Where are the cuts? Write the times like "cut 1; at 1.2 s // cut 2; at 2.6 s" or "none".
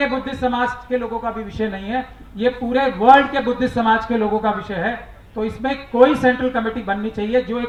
none

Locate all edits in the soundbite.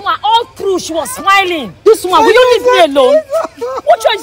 cut 1; at 1.7 s

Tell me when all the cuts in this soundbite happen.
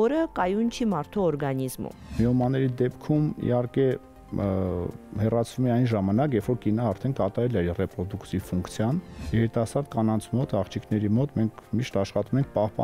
cut 1; at 2.1 s // cut 2; at 9.2 s

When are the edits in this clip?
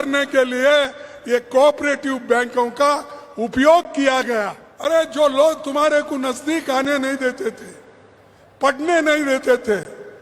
cut 1; at 4.6 s

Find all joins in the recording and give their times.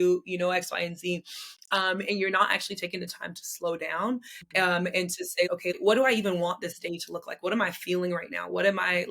cut 1; at 5.7 s

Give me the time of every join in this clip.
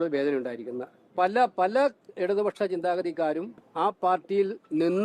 cut 1; at 1.0 s // cut 2; at 3.6 s

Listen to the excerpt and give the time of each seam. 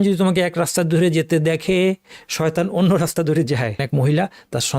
cut 1; at 3.8 s

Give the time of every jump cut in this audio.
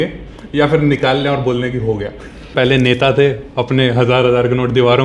cut 1; at 2.5 s

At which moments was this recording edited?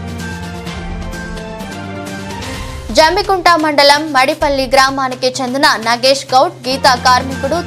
cut 1; at 1.2 s

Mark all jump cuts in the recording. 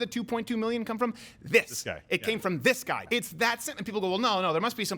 cut 1; at 3.0 s

